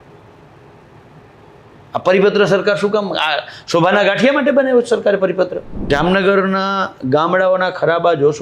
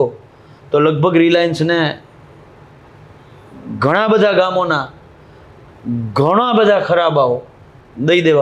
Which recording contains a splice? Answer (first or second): first